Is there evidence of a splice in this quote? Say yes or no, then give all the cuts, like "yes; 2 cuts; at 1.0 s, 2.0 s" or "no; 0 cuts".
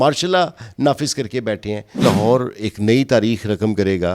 yes; 1 cut; at 2.0 s